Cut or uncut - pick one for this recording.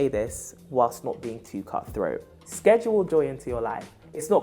cut